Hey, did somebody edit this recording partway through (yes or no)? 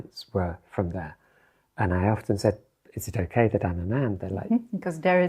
no